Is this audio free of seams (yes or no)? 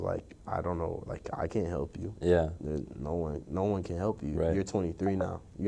yes